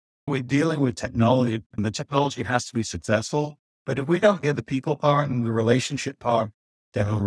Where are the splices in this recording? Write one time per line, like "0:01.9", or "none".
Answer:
0:01.8